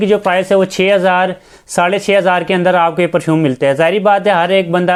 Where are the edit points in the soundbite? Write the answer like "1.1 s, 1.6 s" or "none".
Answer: none